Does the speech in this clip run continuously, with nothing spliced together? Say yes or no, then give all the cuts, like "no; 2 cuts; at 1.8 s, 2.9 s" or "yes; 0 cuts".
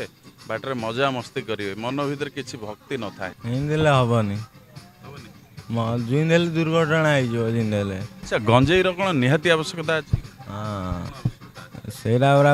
no; 3 cuts; at 3.3 s, 8.1 s, 11.1 s